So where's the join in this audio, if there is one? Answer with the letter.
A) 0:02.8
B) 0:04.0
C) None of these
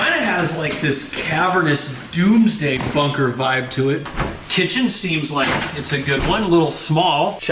B